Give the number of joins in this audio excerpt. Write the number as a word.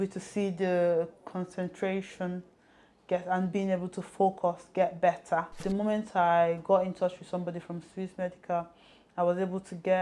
one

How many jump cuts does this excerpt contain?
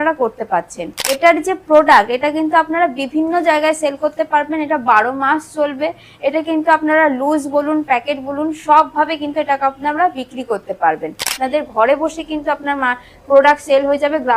two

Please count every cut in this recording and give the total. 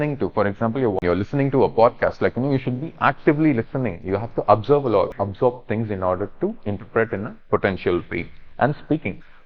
two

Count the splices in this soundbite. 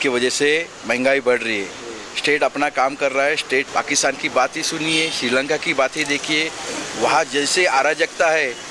one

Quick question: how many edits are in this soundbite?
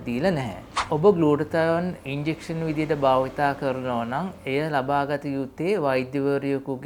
two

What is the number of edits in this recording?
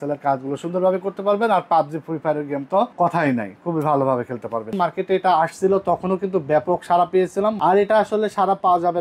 three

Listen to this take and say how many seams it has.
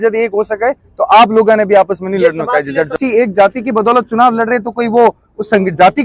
one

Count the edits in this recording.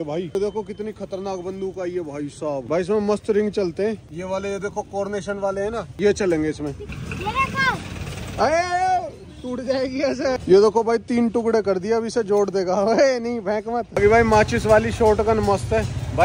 two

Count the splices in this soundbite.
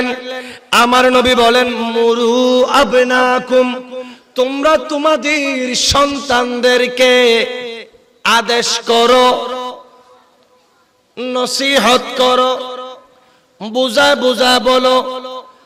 zero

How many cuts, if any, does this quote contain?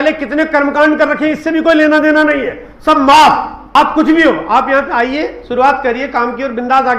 one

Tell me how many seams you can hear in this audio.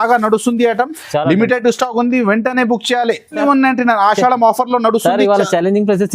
one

